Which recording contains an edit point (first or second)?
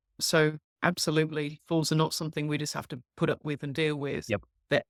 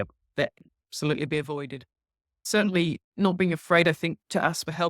second